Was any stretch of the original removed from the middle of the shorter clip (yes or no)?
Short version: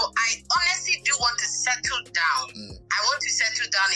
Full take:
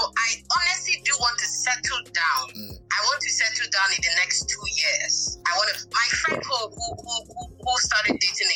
no